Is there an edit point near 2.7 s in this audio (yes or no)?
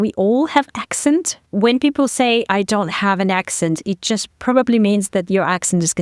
no